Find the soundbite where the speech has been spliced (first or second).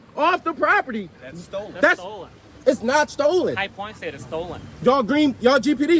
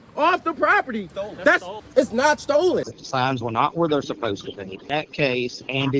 second